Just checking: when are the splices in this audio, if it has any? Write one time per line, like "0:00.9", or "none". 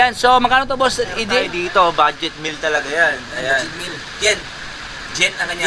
0:01.5